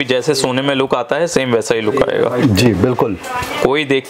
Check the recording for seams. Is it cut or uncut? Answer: uncut